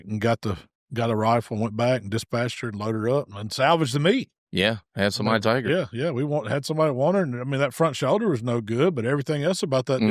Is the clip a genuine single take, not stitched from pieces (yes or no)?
yes